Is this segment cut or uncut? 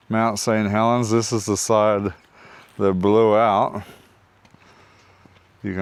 uncut